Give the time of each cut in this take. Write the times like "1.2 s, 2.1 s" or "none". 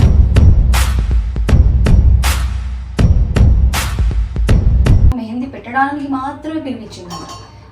5.1 s